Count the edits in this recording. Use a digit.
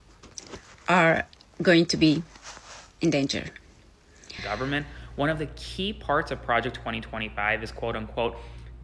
1